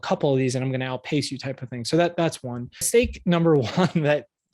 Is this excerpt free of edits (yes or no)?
no